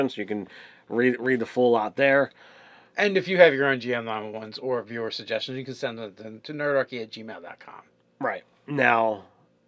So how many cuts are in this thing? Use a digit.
1